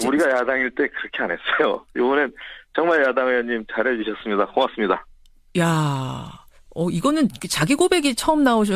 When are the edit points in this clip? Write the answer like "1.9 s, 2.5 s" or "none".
7.7 s

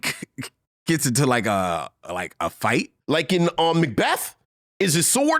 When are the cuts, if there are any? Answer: 3.0 s

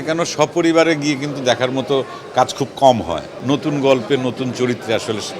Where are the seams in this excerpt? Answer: 3.3 s

